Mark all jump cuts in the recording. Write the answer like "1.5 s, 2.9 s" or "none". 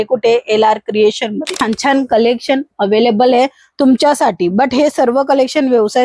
1.6 s